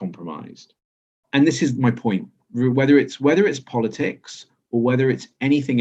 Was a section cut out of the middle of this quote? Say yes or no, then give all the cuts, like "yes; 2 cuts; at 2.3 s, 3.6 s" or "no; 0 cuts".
no; 0 cuts